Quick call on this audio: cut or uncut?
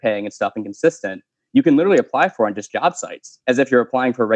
uncut